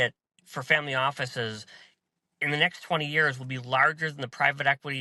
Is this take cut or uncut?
uncut